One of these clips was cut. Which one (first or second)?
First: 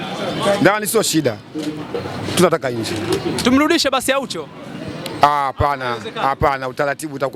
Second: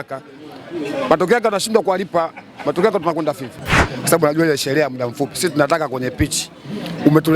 second